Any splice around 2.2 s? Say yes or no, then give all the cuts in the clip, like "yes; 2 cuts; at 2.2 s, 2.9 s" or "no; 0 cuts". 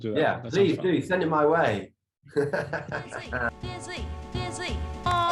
no; 1 cut; at 3.5 s